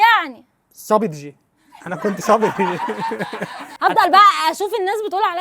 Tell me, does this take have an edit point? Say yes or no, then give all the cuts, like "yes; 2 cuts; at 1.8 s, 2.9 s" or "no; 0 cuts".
yes; 1 cut; at 3.6 s